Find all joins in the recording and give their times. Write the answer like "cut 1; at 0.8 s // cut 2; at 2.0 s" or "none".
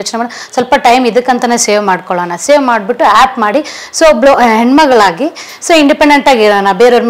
none